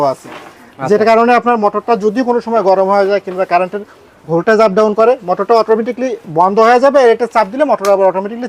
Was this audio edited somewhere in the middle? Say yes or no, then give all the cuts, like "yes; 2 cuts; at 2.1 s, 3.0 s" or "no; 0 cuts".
no; 0 cuts